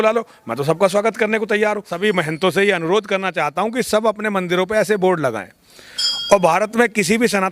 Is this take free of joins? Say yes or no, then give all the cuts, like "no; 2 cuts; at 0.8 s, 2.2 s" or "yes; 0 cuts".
no; 1 cut; at 1.9 s